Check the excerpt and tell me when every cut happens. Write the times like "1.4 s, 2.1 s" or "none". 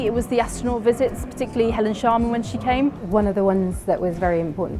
3.0 s